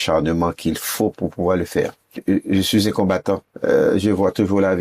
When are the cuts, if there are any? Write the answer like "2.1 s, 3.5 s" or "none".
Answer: 2.2 s, 3.5 s